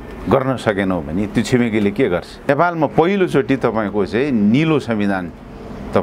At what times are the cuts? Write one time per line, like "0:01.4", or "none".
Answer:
0:02.5